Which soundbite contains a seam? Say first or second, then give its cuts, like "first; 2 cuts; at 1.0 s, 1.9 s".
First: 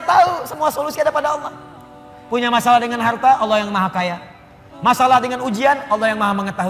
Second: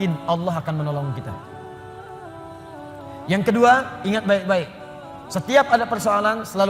second; 2 cuts; at 1.5 s, 3.3 s